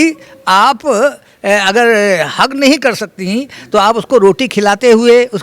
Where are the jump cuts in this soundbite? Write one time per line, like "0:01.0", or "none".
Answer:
none